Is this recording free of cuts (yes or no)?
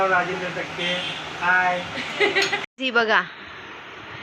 no